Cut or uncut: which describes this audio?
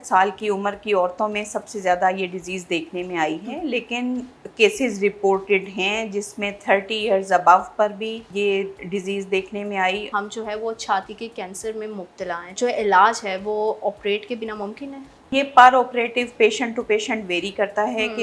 cut